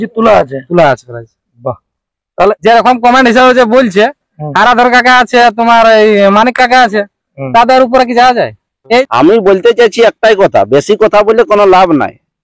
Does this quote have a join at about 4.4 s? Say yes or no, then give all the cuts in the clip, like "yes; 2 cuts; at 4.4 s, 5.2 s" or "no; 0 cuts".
no; 2 cuts; at 2.6 s, 9.1 s